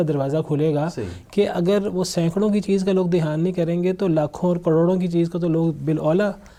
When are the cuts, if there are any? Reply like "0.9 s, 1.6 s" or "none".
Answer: none